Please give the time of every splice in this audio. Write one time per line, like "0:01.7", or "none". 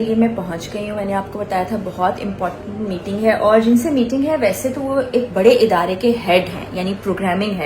none